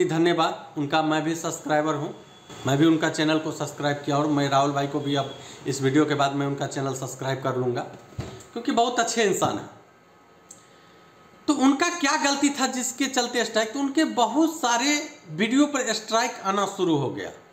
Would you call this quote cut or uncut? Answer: uncut